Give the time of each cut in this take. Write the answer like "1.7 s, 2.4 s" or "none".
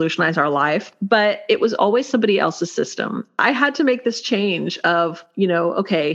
0.9 s, 3.3 s, 5.2 s